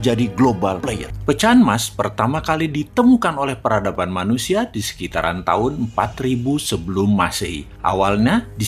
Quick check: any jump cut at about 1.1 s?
yes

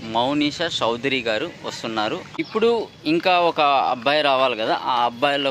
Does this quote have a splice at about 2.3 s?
yes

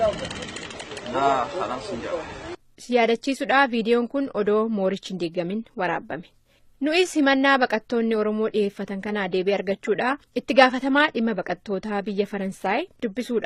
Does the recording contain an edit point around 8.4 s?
no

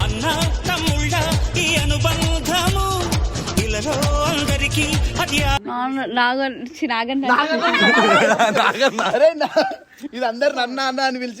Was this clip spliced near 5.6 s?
yes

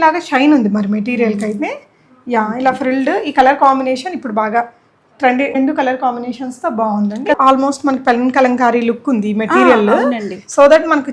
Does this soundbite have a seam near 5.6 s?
yes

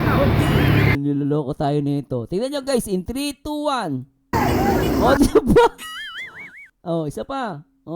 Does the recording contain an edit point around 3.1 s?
no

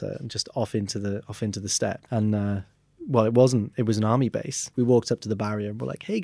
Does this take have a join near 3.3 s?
no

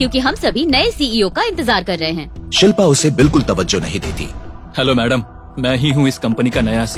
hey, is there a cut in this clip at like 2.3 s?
no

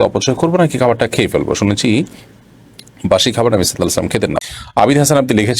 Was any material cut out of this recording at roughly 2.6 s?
no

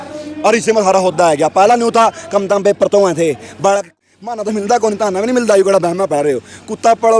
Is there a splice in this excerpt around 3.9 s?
yes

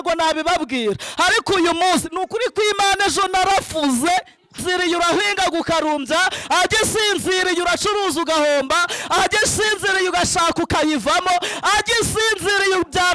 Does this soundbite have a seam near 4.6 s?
yes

